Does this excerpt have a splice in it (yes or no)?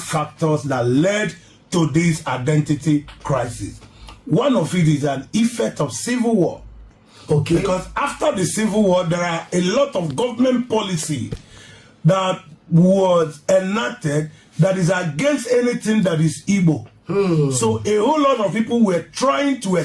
no